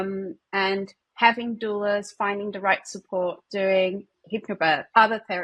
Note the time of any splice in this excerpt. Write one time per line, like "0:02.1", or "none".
0:01.0
0:04.2